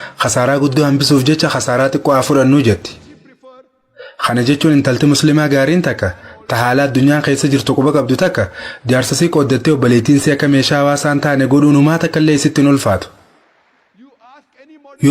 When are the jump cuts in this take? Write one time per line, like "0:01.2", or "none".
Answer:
none